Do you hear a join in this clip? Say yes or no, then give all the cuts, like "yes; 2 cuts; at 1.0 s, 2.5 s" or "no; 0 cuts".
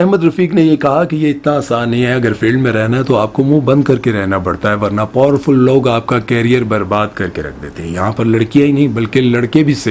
no; 0 cuts